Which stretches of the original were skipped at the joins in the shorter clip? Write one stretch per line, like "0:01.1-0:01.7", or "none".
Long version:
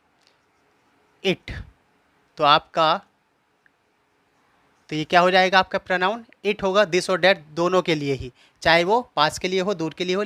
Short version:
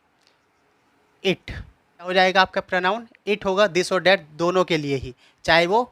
0:02.1-0:05.3